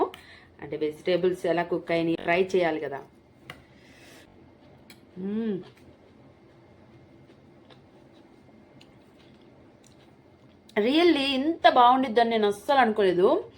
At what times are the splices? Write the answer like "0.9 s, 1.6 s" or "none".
2.2 s, 4.3 s